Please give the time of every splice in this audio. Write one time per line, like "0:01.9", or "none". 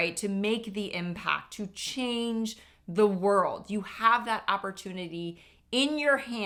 none